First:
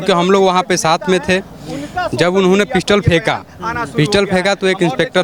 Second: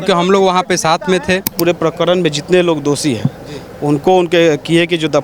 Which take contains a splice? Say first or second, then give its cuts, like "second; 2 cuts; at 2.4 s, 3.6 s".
second; 1 cut; at 1.5 s